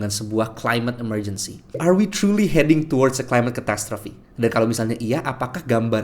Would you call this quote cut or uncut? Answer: cut